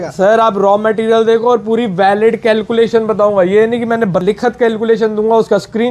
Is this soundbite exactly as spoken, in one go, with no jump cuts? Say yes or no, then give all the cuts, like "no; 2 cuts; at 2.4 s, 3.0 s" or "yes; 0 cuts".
no; 1 cut; at 4.2 s